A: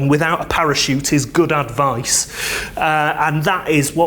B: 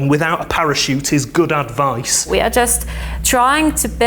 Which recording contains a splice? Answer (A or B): B